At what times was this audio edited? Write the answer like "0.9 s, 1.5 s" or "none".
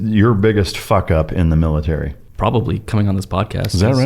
2.2 s